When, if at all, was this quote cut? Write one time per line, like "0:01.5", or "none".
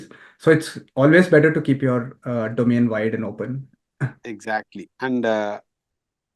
none